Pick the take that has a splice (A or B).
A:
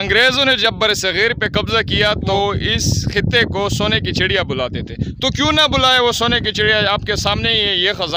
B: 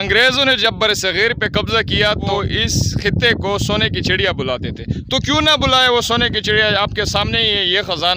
B